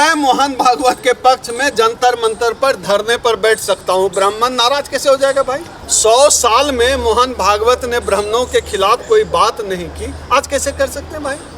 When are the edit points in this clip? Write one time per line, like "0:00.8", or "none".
0:05.7